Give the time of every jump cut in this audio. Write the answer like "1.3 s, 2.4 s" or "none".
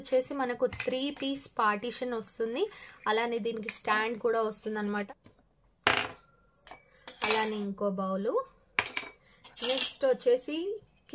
5.1 s